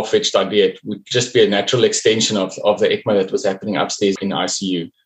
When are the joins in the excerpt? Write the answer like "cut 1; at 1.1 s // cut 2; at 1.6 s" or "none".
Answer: cut 1; at 4.2 s